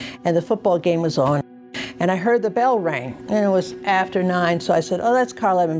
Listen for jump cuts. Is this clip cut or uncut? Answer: cut